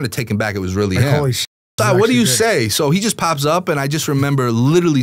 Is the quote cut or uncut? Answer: uncut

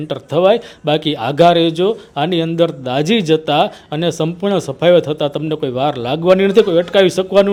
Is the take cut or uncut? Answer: uncut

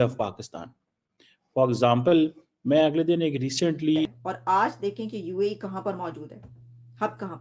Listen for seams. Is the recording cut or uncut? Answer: cut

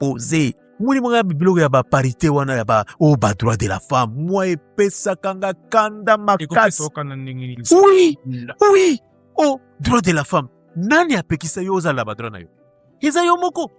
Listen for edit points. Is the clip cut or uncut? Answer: uncut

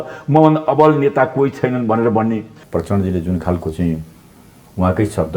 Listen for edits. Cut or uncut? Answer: cut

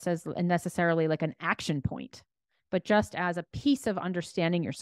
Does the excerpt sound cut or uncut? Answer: uncut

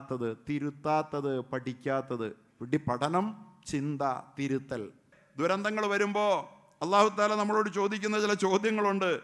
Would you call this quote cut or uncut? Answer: cut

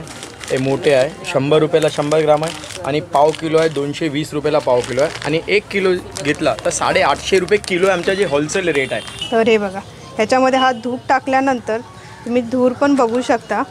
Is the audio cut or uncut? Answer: cut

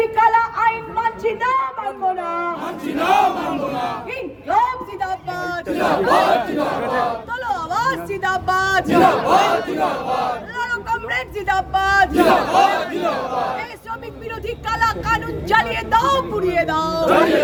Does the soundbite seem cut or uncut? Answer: uncut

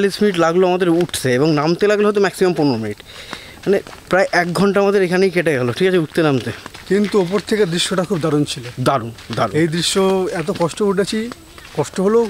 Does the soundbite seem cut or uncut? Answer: uncut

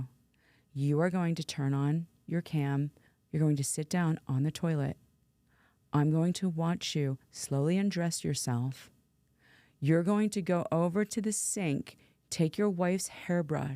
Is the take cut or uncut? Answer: cut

